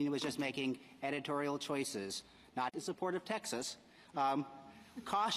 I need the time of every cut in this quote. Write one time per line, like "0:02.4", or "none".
none